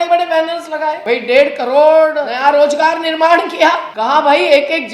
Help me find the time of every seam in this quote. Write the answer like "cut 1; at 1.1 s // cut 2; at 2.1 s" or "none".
cut 1; at 1.0 s // cut 2; at 2.3 s // cut 3; at 3.9 s